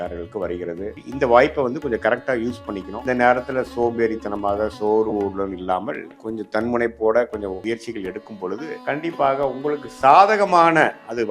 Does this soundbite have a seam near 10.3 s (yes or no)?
no